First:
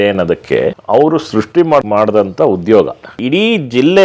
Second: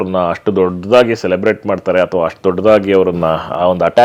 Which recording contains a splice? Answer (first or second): first